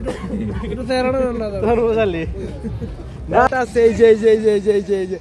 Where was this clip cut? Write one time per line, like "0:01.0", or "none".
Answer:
0:03.5